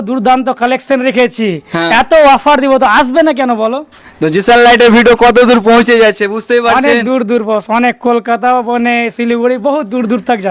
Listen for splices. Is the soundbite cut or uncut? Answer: uncut